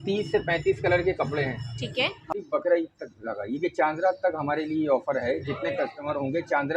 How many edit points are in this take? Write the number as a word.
one